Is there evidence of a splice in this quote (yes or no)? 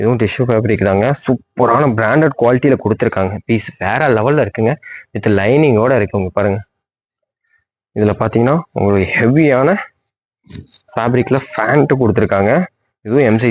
no